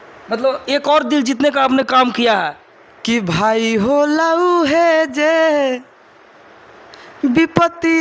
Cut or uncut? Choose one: uncut